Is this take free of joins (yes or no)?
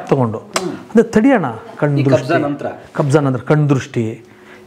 yes